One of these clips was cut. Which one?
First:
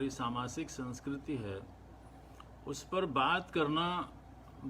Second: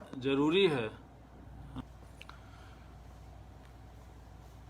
second; 1 cut; at 1.5 s

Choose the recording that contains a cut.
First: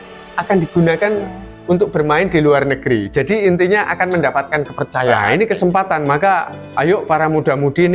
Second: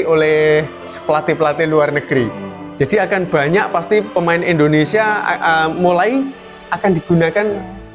first; 1 cut; at 5.2 s

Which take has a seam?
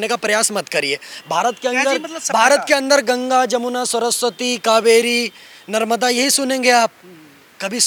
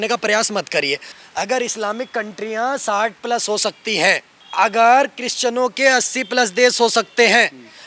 second; 2 cuts; at 1.1 s, 4.4 s

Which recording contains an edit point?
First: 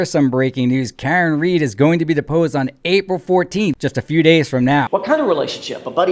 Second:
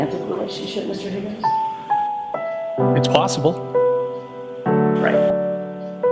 first; 2 cuts; at 3.8 s, 4.9 s

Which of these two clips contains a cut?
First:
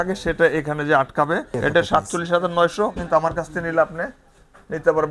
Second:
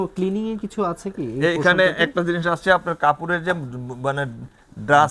first; 1 cut; at 1.6 s

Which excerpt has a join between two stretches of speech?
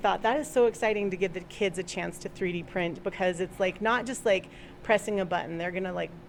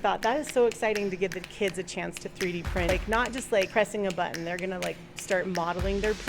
second; 2 cuts; at 2.9 s, 3.7 s

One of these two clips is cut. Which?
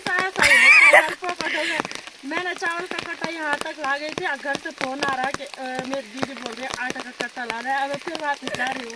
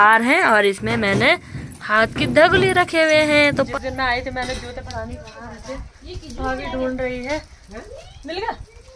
second; 1 cut; at 3.7 s

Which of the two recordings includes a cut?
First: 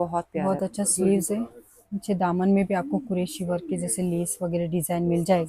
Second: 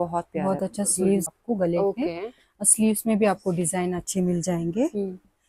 second; 1 cut; at 1.3 s

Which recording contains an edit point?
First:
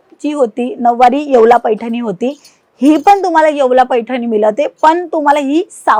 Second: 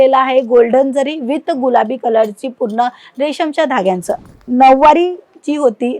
second; 1 cut; at 4.1 s

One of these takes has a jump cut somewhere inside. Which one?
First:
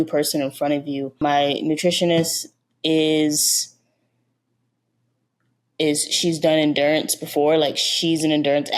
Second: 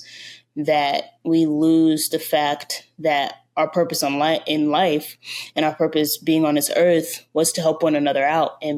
first; 1 cut; at 1.2 s

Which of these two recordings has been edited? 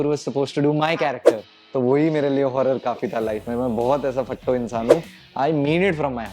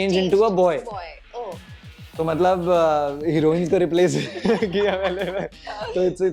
first; 2 cuts; at 1.5 s, 5.2 s

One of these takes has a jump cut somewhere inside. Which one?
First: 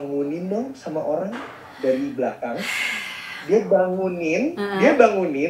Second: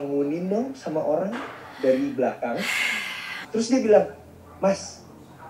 second; 1 cut; at 3.4 s

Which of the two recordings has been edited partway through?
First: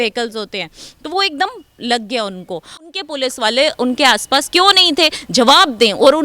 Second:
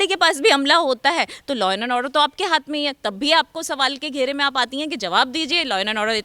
first; 1 cut; at 2.9 s

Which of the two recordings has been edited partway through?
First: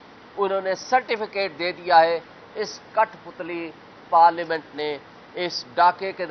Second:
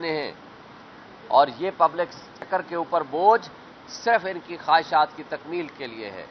second; 1 cut; at 2.3 s

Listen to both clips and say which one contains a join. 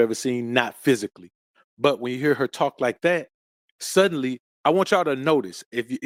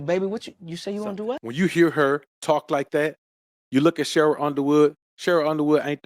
second; 1 cut; at 1.5 s

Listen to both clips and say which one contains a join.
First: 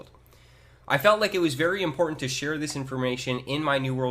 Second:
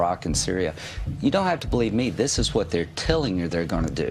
first; 1 cut; at 2.8 s

